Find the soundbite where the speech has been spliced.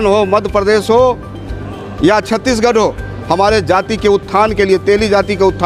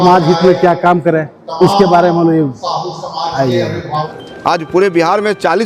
second; 1 cut; at 4.1 s

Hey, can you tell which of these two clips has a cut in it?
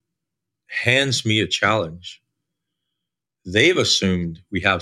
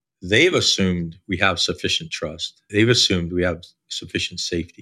second; 1 cut; at 2.5 s

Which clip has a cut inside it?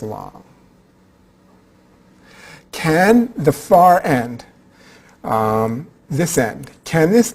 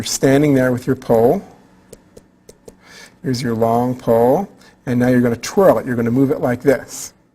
second; 1 cut; at 1.0 s

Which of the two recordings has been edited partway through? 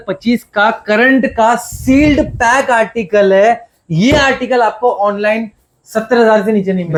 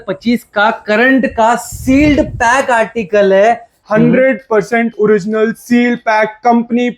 second; 1 cut; at 3.8 s

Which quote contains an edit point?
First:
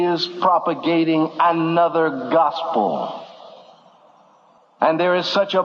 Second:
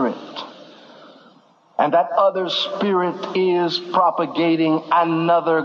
first; 1 cut; at 4.4 s

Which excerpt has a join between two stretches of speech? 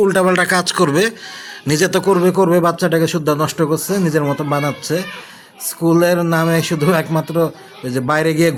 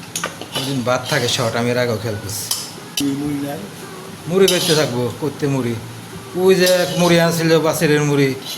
second; 1 cut; at 3.0 s

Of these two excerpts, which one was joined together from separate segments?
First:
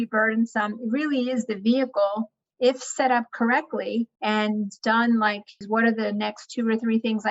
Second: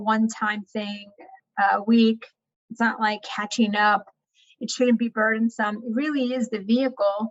first; 2 cuts; at 4.4 s, 5.6 s

